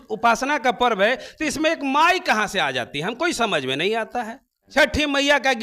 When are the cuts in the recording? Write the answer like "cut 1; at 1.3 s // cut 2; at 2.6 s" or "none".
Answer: cut 1; at 4.6 s